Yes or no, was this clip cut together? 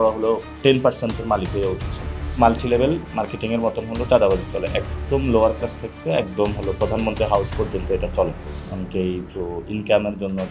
yes